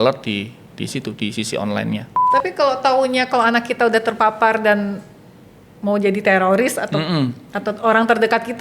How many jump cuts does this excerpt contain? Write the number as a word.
one